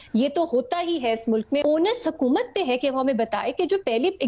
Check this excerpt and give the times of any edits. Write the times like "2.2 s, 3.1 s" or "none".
1.6 s